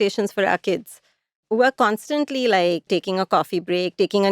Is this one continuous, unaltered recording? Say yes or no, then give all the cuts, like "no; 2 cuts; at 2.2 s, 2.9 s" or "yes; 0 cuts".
no; 1 cut; at 2.9 s